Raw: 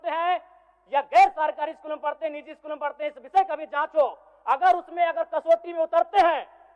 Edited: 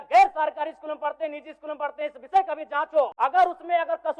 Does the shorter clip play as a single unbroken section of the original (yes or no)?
no